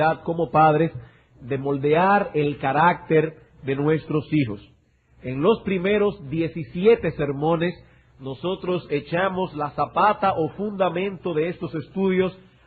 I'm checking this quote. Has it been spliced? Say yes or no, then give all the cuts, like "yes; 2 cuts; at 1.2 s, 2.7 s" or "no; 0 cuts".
no; 0 cuts